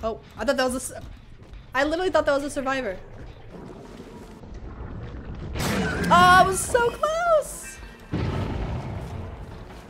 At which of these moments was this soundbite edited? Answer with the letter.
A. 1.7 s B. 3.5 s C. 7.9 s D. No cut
B